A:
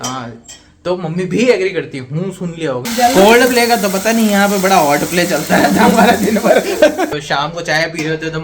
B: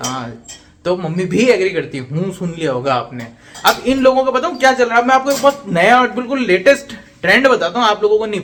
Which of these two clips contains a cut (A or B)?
A